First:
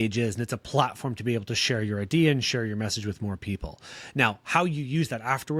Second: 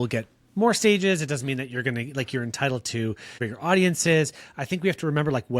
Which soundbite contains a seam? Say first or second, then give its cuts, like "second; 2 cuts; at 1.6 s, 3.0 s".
second; 1 cut; at 3.5 s